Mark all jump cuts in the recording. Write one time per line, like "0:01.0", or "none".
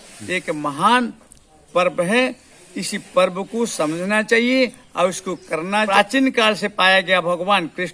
0:05.9

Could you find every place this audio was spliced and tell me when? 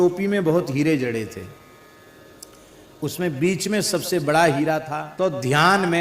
0:05.0

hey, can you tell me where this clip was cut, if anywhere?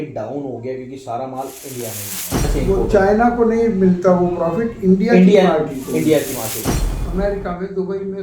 0:02.5
0:06.6

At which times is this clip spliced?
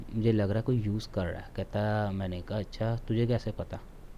none

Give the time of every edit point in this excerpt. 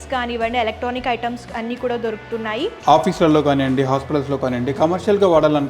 0:02.8

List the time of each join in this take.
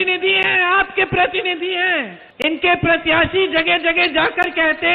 0:02.2

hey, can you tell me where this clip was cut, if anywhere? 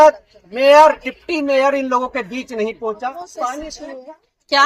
0:03.7

